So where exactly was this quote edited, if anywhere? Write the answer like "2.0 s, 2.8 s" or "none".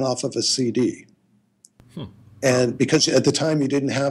none